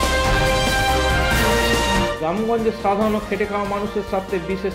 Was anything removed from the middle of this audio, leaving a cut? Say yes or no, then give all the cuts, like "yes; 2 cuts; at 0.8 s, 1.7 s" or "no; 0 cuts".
yes; 1 cut; at 2.1 s